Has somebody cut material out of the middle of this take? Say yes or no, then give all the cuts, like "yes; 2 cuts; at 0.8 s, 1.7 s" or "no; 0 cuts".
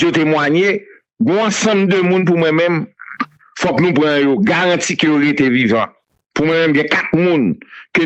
no; 0 cuts